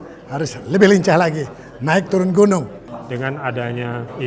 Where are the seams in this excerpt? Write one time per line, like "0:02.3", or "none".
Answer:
0:02.8